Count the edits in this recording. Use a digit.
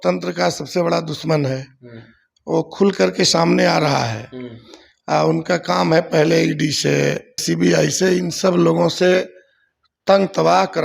1